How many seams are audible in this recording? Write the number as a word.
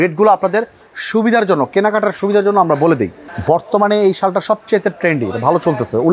one